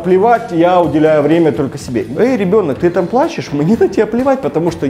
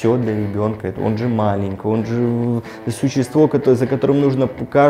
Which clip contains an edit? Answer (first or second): first